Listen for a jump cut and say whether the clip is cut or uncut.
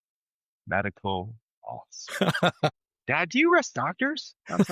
uncut